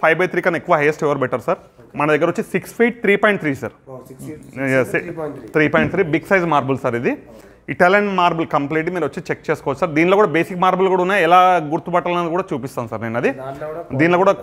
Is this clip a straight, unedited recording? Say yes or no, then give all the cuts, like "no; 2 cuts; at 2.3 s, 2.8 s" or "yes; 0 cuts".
yes; 0 cuts